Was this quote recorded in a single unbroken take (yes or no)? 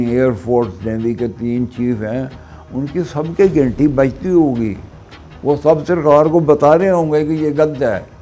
yes